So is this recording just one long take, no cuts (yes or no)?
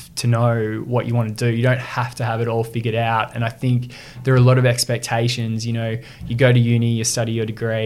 yes